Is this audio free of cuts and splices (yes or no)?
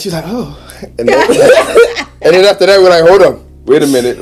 yes